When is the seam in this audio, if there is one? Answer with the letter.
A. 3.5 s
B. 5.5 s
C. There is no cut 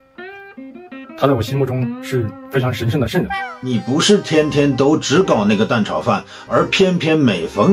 A